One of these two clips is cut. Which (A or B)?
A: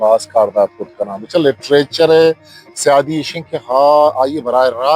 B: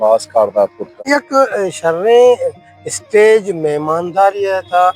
B